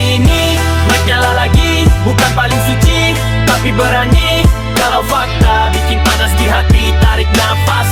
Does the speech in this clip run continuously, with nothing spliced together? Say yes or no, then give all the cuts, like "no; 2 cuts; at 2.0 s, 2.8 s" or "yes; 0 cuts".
yes; 0 cuts